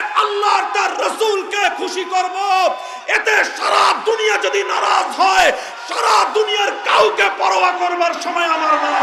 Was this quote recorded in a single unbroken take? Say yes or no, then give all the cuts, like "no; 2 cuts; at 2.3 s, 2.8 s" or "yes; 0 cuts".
yes; 0 cuts